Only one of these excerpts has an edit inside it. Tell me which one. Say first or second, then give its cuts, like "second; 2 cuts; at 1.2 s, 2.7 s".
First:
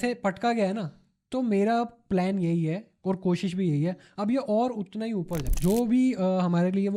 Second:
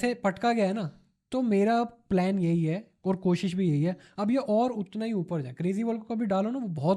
first; 1 cut; at 5.5 s